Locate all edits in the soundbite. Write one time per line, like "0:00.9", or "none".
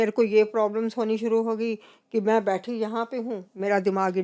none